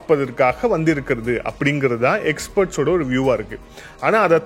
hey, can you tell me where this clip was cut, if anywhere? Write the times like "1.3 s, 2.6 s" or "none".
none